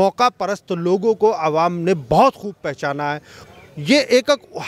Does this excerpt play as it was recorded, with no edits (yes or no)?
no